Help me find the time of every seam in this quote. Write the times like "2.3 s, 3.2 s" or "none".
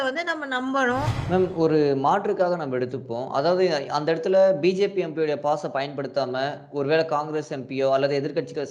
1.2 s